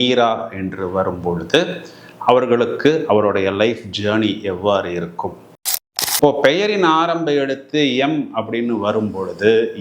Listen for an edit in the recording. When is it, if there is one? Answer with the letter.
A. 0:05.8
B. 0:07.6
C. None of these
A